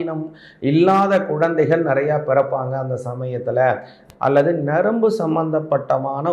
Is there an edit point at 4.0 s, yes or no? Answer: yes